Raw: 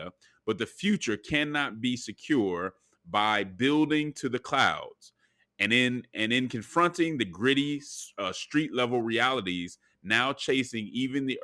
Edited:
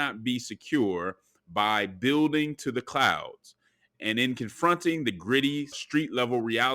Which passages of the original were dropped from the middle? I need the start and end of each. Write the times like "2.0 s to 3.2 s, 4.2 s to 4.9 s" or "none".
5.5 s to 6.1 s, 7.9 s to 8.4 s